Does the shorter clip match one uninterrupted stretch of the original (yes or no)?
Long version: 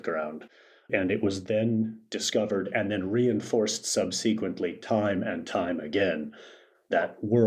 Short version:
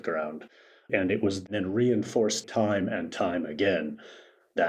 no